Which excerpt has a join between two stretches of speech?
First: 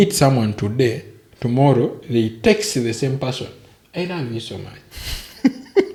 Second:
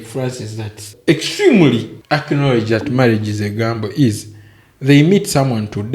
second; 2 cuts; at 0.9 s, 1.9 s

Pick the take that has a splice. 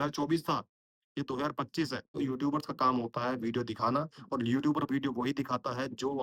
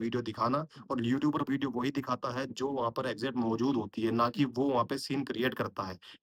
first; 1 cut; at 2.1 s

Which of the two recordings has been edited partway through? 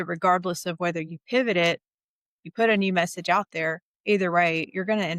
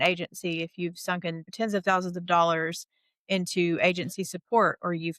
second; 1 cut; at 1.5 s

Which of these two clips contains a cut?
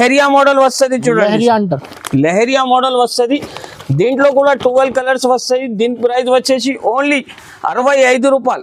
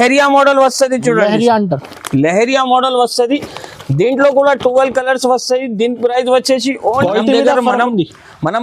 second; 1 cut; at 7.0 s

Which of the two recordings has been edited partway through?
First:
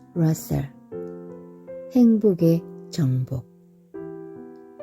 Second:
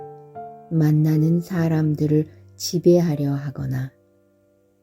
first; 1 cut; at 3.4 s

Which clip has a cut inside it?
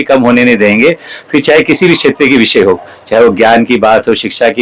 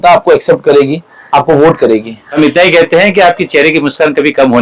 second; 1 cut; at 2.2 s

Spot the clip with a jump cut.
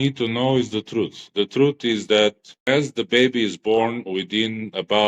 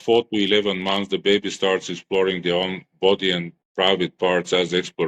first; 1 cut; at 2.6 s

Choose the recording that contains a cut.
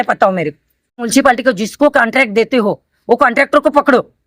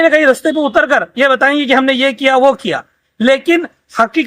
first; 1 cut; at 1.1 s

